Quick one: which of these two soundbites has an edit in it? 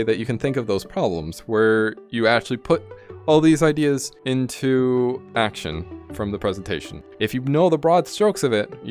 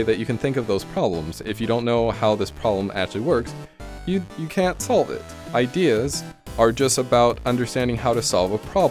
first; 4 cuts; at 1.4 s, 4.1 s, 5.2 s, 7.1 s

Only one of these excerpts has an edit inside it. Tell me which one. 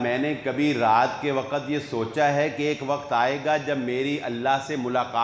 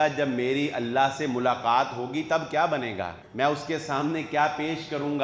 second; 1 cut; at 3.2 s

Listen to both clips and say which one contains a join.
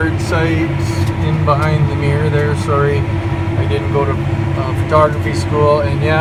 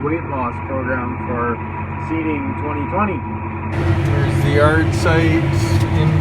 second; 1 cut; at 3.7 s

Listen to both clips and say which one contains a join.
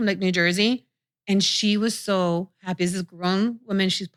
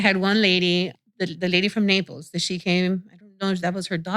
second; 1 cut; at 0.9 s

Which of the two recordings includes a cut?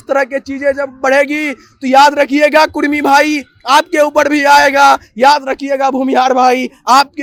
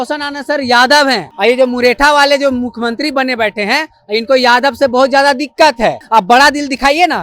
second; 2 cuts; at 1.3 s, 6.0 s

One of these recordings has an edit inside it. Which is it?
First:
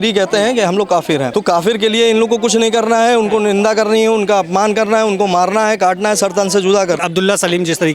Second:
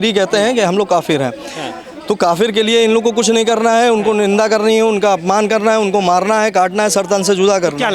first; 2 cuts; at 1.3 s, 7.0 s

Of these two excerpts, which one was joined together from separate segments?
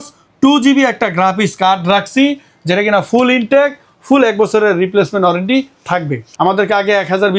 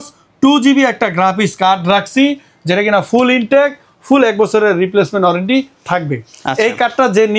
first; 1 cut; at 6.2 s

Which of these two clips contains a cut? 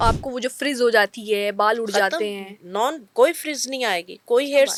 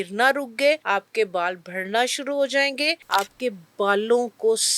second; 2 cuts; at 0.8 s, 3.0 s

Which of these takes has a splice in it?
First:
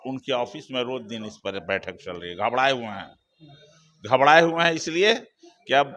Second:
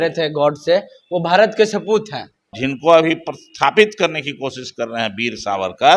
second; 1 cut; at 2.6 s

